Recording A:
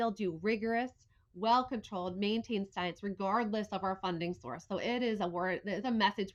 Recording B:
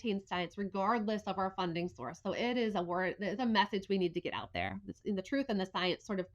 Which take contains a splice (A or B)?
B